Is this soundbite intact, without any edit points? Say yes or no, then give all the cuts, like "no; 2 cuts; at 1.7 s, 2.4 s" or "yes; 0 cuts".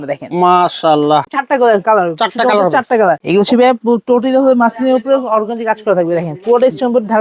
no; 2 cuts; at 1.2 s, 3.2 s